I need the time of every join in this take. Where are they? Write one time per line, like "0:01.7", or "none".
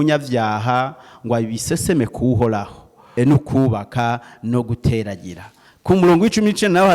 0:03.0